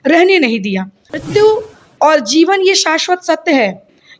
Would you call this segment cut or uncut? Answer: cut